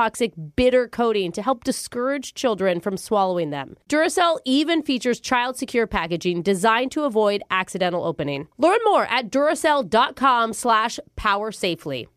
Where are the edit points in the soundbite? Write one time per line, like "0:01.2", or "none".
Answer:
none